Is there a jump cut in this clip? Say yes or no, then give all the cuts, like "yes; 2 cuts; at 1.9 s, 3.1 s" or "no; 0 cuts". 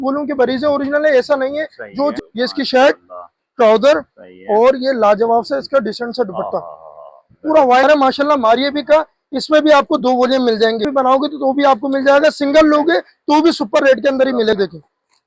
yes; 4 cuts; at 2.1 s, 7.8 s, 10.9 s, 14.5 s